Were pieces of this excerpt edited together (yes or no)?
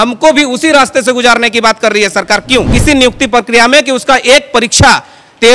yes